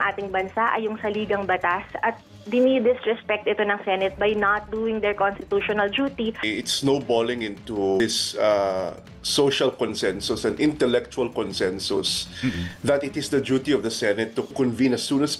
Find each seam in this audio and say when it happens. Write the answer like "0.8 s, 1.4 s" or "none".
6.4 s, 8.0 s, 14.5 s